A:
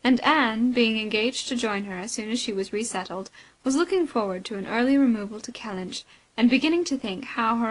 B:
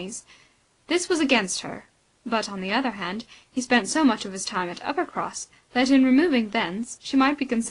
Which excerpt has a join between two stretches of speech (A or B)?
A